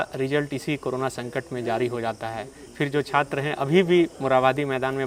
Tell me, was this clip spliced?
no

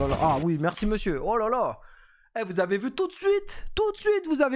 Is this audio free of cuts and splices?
yes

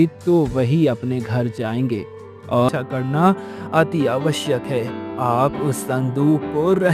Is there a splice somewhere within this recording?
yes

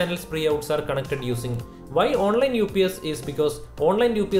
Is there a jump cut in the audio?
yes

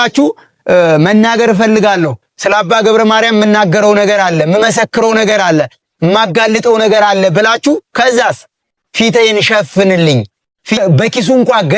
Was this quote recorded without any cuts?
no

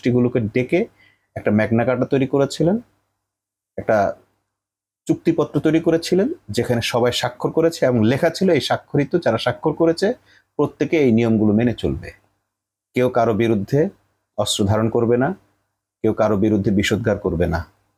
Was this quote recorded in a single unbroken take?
yes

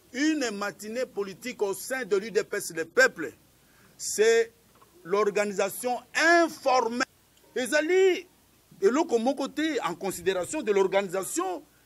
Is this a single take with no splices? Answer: no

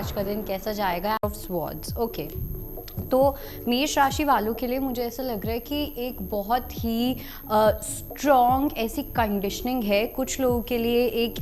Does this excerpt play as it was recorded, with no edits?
no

